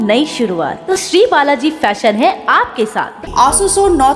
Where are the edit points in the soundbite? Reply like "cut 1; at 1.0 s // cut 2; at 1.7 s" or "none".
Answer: cut 1; at 3.2 s